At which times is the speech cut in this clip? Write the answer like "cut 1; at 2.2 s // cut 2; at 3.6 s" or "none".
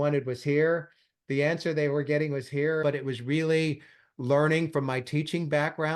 cut 1; at 2.8 s